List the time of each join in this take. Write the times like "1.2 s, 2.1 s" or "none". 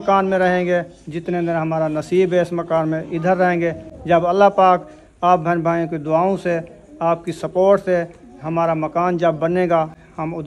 none